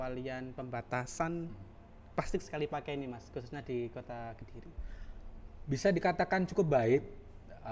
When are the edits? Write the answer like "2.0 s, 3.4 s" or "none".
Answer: none